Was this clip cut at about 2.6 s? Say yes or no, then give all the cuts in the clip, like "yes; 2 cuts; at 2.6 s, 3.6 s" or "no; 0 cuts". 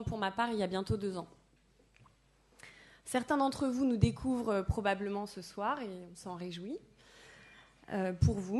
no; 1 cut; at 7.1 s